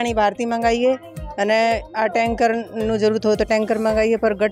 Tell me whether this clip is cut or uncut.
uncut